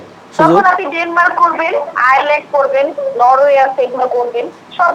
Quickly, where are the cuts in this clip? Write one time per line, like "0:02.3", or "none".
none